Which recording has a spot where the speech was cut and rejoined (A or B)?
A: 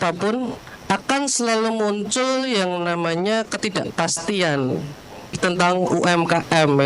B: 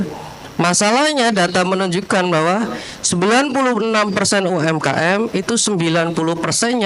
A